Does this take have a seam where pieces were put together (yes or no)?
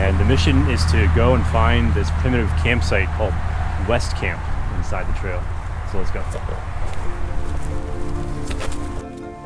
no